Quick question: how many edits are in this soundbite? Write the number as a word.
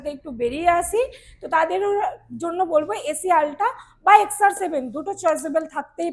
zero